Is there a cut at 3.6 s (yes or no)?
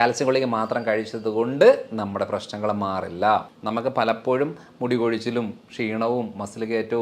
yes